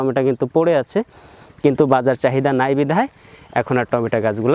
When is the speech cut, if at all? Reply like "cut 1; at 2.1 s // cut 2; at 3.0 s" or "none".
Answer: none